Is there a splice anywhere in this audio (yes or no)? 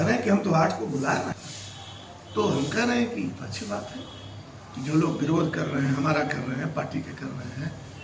yes